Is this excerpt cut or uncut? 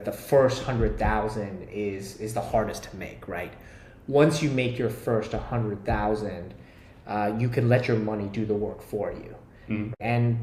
uncut